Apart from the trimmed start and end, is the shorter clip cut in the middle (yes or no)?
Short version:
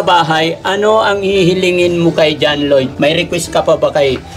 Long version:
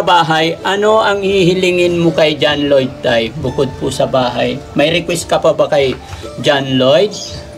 yes